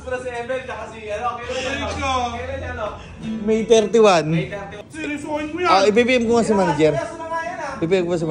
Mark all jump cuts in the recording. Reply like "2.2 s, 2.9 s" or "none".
4.8 s